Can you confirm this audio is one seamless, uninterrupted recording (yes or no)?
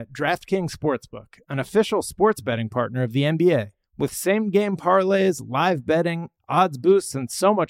yes